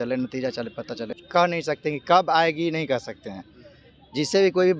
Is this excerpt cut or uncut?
cut